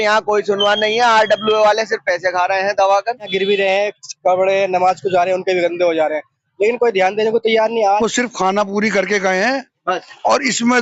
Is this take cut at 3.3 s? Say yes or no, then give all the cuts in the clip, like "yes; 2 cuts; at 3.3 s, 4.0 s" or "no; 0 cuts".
yes; 2 cuts; at 3.3 s, 7.8 s